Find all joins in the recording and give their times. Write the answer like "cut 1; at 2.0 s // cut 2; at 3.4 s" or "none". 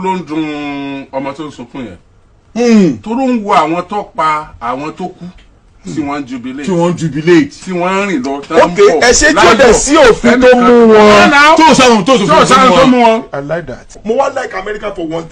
cut 1; at 13.9 s